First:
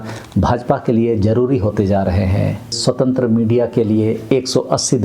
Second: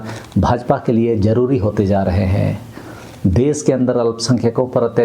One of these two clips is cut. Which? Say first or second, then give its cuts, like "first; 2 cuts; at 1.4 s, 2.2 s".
first; 1 cut; at 2.8 s